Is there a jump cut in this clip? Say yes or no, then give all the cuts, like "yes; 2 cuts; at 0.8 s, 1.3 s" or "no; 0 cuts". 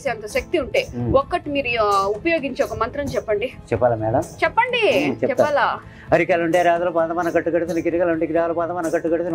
no; 0 cuts